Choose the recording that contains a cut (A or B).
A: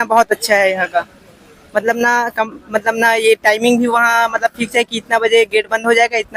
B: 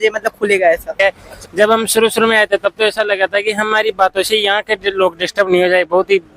B